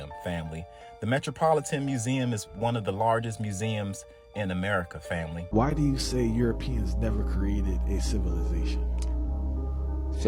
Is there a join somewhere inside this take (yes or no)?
yes